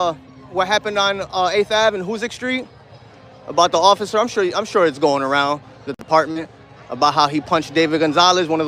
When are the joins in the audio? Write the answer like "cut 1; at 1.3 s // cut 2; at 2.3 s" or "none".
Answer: none